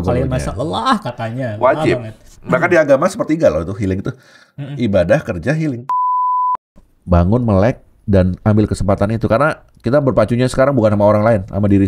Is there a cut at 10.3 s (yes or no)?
no